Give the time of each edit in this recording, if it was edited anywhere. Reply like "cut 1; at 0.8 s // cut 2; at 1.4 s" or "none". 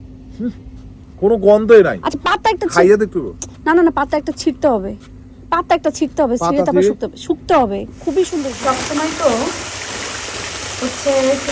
cut 1; at 8.5 s